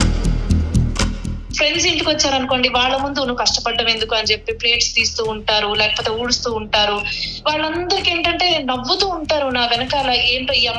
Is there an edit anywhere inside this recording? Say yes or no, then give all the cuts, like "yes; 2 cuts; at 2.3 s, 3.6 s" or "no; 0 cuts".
yes; 1 cut; at 1.4 s